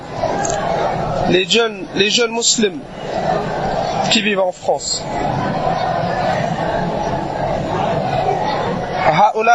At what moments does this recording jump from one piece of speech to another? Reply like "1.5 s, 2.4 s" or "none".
none